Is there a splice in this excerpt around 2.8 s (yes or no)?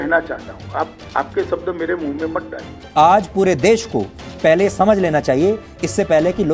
yes